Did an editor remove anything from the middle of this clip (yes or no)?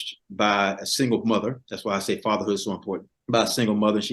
yes